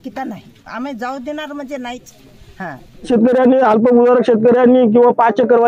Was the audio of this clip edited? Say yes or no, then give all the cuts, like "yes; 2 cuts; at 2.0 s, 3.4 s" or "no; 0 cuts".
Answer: yes; 1 cut; at 3.1 s